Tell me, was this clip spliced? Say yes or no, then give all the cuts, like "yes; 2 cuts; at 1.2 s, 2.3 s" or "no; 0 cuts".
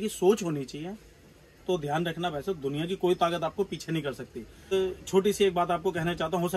yes; 1 cut; at 4.7 s